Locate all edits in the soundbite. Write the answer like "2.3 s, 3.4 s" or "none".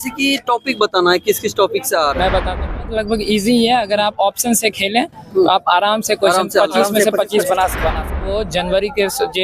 2.8 s, 8.3 s